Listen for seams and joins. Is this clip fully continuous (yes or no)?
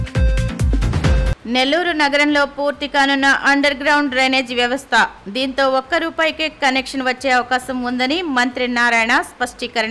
no